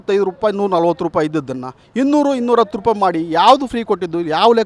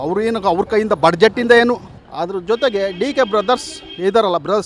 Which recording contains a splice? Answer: second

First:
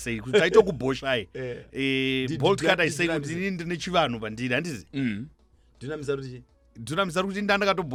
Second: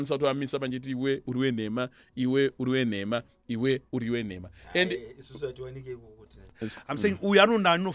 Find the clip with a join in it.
second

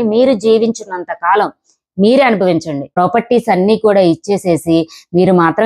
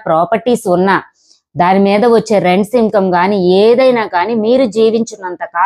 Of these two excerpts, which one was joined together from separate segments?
first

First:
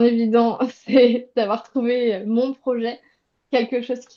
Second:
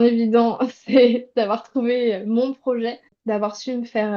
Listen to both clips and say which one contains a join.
second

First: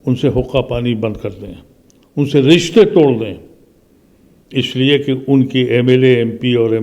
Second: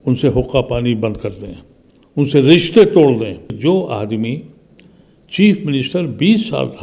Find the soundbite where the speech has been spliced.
second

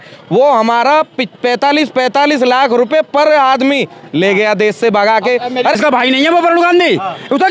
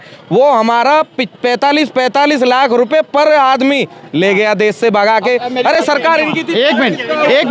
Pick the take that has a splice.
first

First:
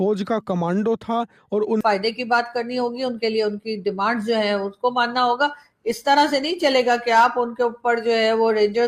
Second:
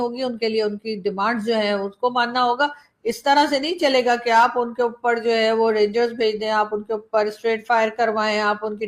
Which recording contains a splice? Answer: first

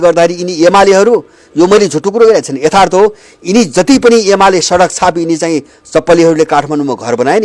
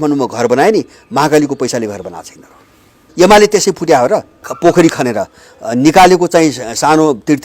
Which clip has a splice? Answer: second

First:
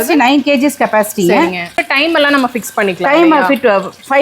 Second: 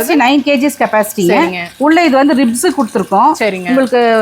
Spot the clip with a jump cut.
first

